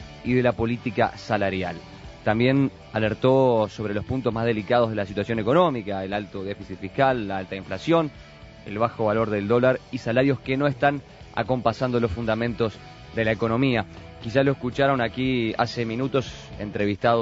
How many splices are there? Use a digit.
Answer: 1